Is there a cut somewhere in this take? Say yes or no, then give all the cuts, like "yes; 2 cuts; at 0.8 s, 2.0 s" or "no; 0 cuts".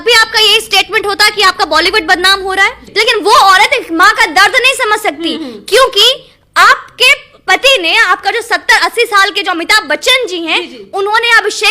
yes; 1 cut; at 2.8 s